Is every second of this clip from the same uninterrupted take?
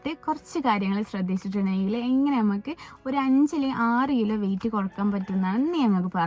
yes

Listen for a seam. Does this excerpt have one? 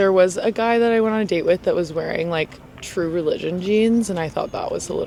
no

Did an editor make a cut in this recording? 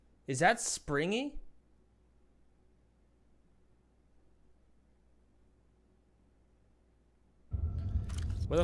no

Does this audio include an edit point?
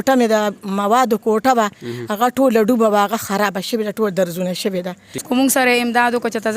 yes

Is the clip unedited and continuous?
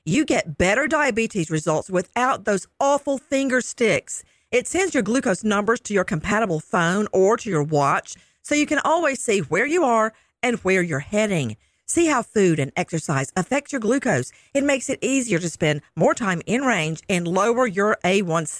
yes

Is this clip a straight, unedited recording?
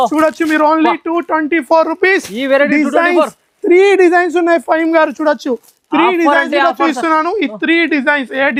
yes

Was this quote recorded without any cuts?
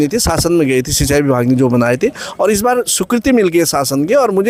yes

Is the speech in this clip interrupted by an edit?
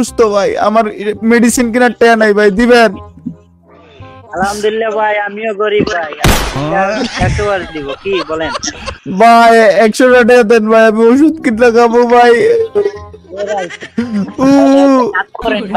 no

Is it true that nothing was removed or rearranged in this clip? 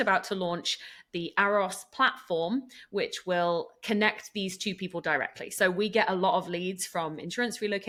yes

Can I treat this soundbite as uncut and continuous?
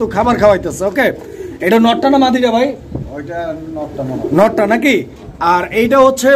yes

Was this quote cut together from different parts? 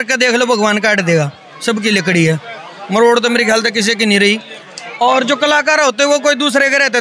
no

